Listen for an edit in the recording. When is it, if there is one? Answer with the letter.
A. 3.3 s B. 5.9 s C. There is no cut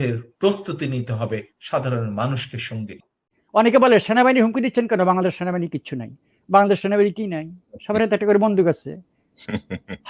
A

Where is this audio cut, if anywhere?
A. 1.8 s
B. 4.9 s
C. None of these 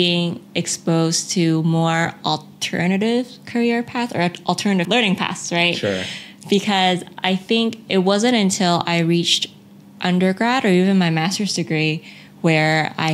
B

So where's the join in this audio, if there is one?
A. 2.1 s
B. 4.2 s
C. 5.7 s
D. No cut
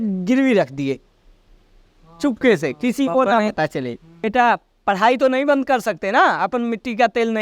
B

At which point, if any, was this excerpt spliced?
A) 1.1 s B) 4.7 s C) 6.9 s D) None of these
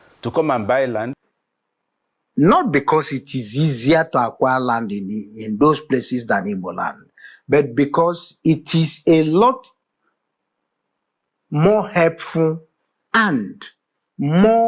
A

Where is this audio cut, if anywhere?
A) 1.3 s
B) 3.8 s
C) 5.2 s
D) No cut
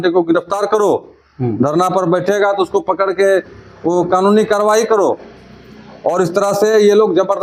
D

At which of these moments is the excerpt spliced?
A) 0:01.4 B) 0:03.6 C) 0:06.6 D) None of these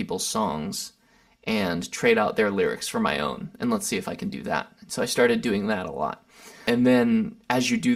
C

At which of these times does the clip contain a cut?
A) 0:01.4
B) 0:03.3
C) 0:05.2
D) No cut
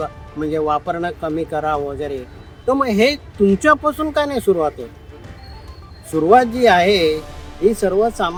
D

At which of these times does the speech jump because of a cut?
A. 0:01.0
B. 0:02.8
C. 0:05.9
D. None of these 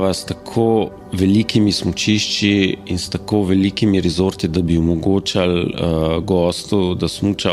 A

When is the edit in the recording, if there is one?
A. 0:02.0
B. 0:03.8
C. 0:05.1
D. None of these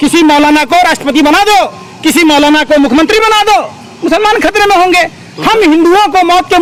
D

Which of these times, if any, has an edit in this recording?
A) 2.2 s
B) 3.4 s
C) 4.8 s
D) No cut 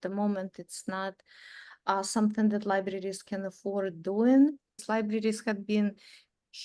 C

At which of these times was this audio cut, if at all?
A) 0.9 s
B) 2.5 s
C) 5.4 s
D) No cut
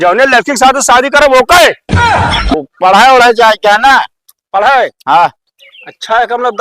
B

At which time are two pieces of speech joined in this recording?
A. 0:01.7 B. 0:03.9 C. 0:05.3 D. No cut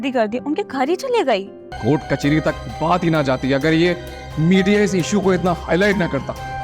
A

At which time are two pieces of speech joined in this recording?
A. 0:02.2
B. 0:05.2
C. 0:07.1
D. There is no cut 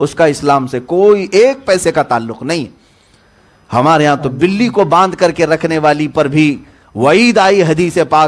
D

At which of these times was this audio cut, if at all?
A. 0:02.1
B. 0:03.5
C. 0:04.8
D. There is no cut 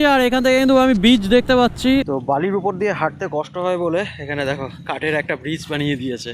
A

